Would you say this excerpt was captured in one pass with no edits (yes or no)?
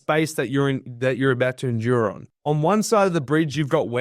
no